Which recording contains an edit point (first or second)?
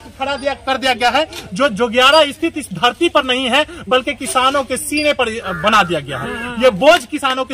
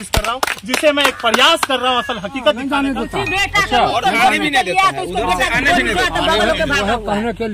second